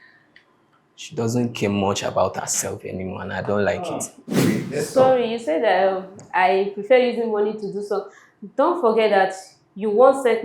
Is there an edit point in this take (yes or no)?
yes